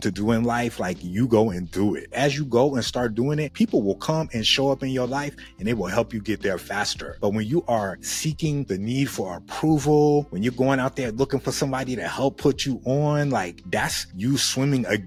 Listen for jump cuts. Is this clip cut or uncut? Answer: uncut